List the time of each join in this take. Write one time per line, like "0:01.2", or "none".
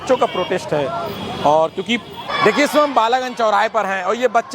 0:02.1